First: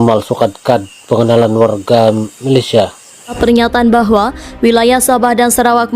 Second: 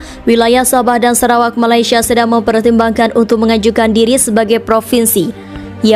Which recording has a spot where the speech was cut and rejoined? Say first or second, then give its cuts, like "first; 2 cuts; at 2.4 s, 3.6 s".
first; 1 cut; at 3.3 s